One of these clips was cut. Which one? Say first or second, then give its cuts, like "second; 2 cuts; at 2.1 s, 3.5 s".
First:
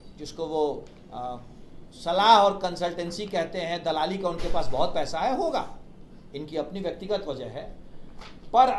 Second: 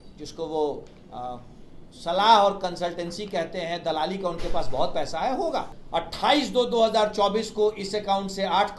second; 1 cut; at 5.8 s